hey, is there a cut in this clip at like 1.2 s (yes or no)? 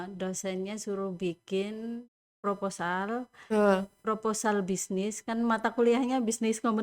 no